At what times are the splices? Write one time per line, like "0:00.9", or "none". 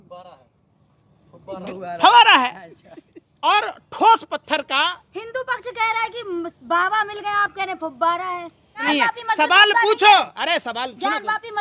0:08.8